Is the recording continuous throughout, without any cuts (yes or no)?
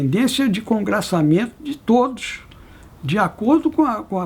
yes